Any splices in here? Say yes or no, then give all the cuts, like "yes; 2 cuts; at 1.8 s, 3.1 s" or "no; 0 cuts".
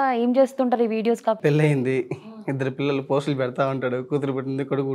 yes; 1 cut; at 1.4 s